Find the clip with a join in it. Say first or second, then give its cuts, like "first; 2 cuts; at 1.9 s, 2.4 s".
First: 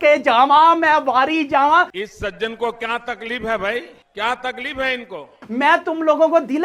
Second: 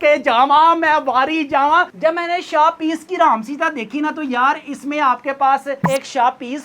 second; 1 cut; at 1.9 s